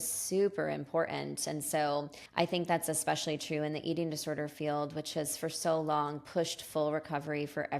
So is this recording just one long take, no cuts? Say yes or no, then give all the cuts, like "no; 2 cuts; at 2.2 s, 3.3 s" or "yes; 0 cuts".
no; 1 cut; at 2.2 s